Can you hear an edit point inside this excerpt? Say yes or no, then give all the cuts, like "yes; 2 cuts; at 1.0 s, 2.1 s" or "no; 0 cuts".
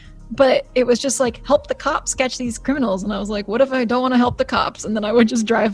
no; 0 cuts